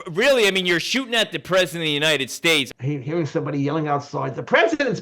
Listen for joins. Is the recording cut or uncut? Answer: cut